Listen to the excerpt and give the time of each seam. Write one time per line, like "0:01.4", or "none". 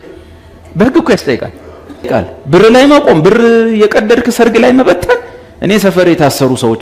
0:02.1